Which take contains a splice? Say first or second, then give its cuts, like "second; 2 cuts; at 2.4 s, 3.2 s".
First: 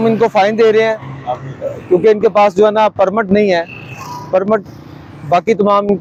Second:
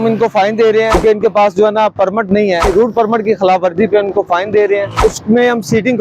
second; 3 cuts; at 1.0 s, 2.6 s, 4.9 s